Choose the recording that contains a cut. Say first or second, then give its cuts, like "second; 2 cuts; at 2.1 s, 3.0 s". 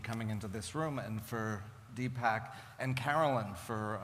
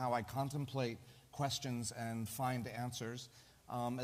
first; 1 cut; at 2.7 s